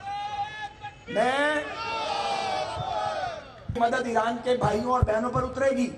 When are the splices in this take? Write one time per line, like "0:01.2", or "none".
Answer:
0:03.7